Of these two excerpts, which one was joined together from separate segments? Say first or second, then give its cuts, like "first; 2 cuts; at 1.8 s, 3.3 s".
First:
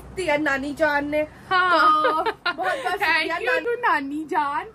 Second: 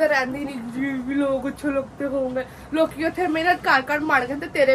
first; 1 cut; at 3.6 s